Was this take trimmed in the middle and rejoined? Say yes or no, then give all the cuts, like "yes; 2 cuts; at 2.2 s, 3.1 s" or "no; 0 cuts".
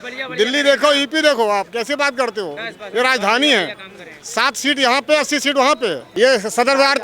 yes; 1 cut; at 6.0 s